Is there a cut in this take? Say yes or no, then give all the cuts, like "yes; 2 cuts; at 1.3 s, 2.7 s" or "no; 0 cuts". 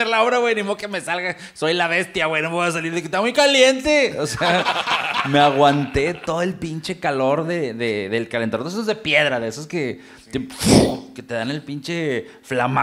no; 0 cuts